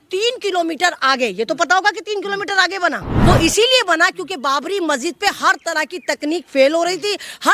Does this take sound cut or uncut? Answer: cut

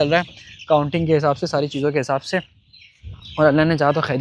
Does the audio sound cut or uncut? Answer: uncut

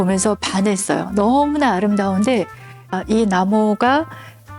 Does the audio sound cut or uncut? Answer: cut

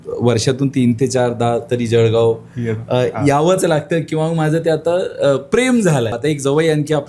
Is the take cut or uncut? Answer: cut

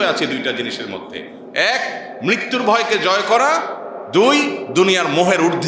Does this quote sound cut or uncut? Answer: uncut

